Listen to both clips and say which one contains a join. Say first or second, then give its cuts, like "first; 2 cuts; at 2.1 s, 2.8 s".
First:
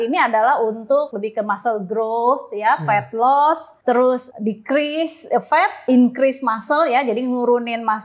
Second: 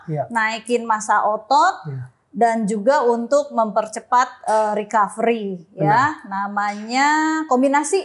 first; 3 cuts; at 1.1 s, 4.0 s, 5.8 s